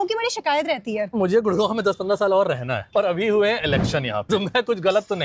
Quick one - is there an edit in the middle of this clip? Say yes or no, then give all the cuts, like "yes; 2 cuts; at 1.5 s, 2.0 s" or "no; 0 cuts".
yes; 3 cuts; at 1.1 s, 2.8 s, 4.3 s